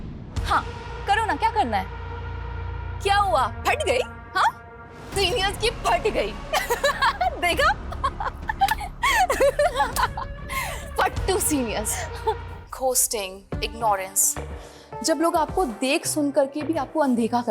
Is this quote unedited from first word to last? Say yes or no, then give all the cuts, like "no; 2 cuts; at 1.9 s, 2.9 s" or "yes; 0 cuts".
no; 1 cut; at 12.5 s